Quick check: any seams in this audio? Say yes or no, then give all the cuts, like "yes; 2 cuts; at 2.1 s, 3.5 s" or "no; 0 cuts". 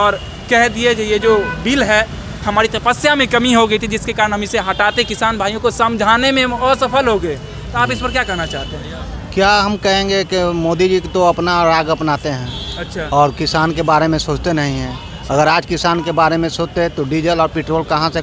no; 0 cuts